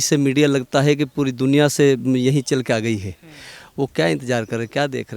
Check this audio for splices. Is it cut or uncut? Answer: uncut